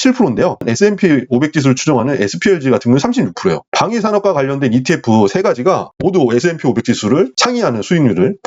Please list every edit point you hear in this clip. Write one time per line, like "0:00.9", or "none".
0:07.4